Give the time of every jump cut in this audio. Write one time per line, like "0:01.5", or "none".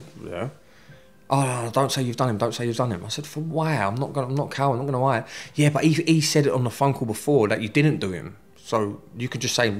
none